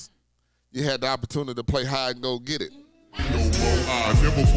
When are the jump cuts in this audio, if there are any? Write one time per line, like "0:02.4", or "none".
0:03.2